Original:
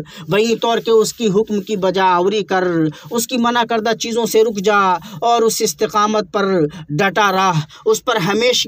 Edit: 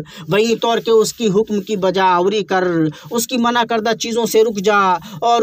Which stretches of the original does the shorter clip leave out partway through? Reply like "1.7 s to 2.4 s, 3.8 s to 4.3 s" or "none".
none